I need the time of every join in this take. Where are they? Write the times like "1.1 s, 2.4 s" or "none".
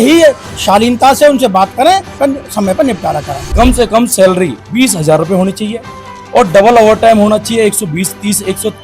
2.1 s, 3.4 s